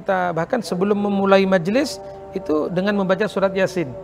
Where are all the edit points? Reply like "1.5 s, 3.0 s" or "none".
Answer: none